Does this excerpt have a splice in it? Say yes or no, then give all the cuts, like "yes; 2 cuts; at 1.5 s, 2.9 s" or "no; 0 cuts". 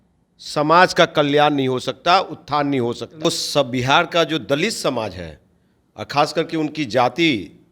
yes; 1 cut; at 3.2 s